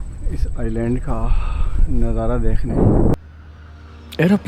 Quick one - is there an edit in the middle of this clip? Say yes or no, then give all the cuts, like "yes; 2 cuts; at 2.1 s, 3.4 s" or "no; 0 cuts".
yes; 1 cut; at 3.1 s